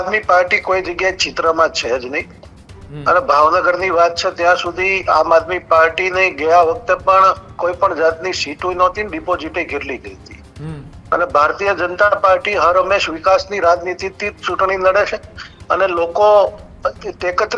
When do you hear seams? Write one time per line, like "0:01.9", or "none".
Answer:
none